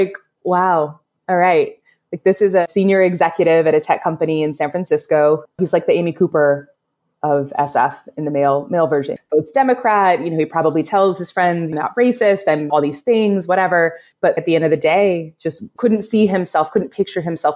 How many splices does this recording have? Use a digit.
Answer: 0